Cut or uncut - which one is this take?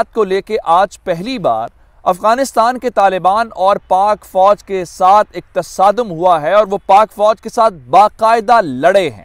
uncut